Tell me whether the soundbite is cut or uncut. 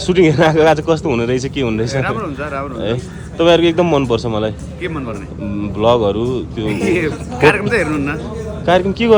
uncut